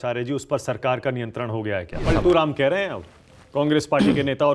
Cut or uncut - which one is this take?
cut